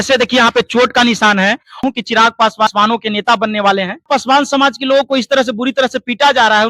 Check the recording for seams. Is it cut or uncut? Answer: cut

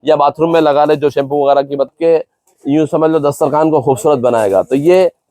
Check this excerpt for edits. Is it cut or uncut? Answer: cut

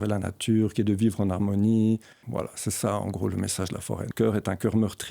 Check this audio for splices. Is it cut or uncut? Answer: cut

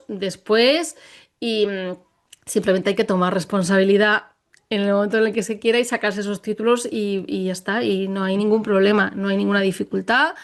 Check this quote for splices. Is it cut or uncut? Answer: uncut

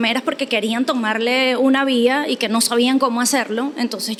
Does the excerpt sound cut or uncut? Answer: uncut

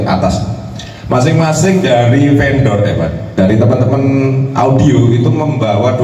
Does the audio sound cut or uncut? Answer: uncut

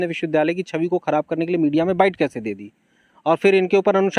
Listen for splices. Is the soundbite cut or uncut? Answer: uncut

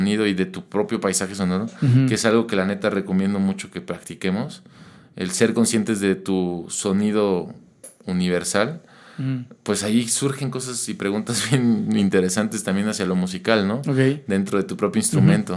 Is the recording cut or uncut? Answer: uncut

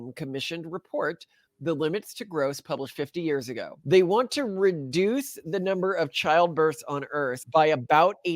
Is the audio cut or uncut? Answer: cut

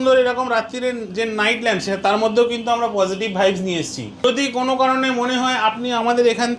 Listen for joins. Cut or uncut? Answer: cut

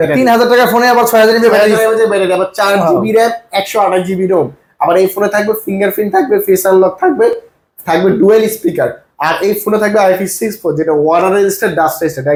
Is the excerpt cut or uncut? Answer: uncut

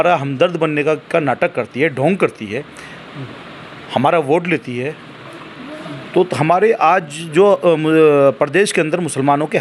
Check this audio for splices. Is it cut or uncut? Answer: uncut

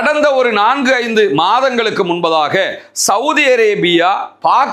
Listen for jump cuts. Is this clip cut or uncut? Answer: uncut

